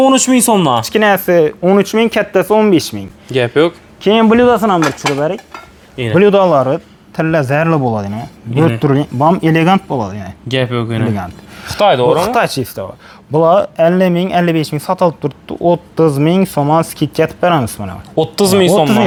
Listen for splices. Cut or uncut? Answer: uncut